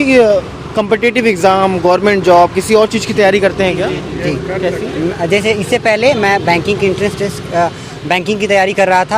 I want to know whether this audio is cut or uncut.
uncut